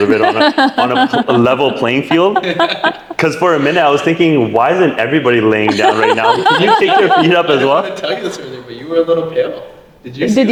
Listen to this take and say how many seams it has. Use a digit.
0